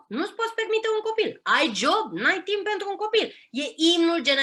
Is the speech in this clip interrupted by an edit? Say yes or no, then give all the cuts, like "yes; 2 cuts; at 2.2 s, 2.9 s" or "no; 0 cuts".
no; 0 cuts